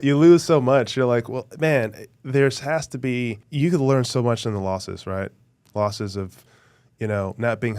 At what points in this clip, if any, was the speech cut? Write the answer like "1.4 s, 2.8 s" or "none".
3.4 s